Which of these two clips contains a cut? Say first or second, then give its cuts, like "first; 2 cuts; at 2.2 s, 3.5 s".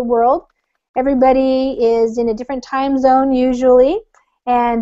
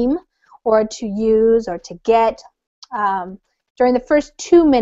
first; 1 cut; at 1.3 s